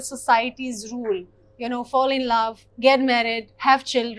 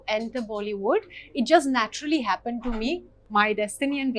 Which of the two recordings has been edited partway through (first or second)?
second